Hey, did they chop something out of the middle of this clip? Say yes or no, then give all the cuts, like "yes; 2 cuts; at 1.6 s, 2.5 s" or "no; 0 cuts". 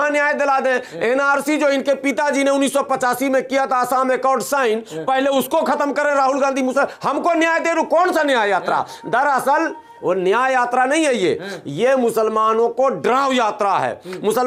no; 0 cuts